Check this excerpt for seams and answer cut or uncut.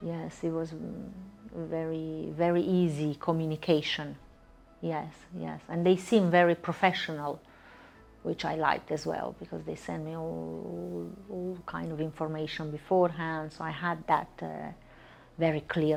uncut